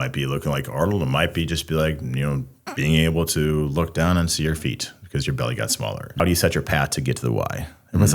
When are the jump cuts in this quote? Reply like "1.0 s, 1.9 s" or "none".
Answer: 2.6 s, 6.2 s